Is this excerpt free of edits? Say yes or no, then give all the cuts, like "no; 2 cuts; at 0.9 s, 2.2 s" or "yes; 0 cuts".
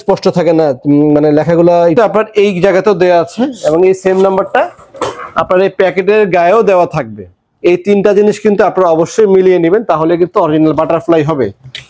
no; 1 cut; at 1.9 s